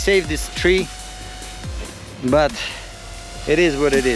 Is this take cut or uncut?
uncut